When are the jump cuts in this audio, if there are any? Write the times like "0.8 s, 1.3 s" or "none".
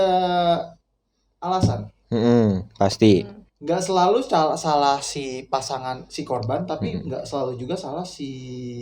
none